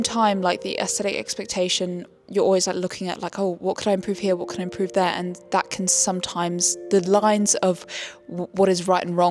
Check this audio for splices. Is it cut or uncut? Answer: uncut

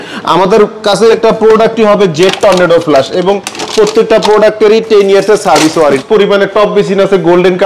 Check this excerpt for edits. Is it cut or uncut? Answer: cut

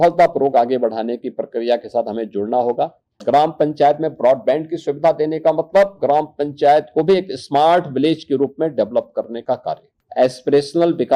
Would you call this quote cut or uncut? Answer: cut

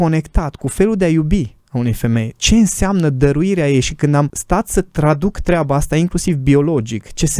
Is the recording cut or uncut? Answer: cut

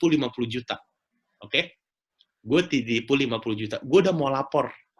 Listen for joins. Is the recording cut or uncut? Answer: uncut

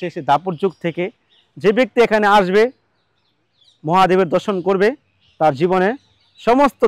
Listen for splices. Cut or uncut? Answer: uncut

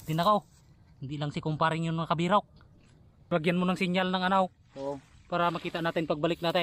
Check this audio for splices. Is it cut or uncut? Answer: cut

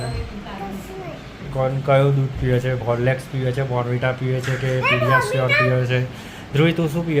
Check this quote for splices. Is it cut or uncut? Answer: cut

